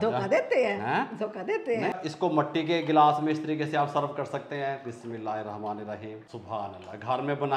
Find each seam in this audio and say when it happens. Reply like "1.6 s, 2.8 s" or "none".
2.0 s, 6.3 s